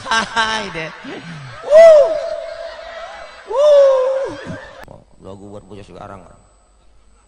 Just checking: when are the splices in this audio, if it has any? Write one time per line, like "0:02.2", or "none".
0:04.8